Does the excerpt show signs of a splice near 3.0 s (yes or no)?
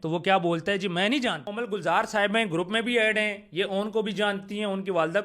no